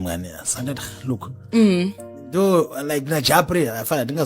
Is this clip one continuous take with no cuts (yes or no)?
no